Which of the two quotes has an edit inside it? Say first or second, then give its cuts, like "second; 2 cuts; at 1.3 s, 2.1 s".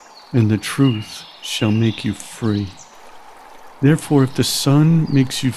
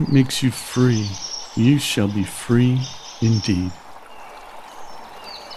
second; 1 cut; at 3.8 s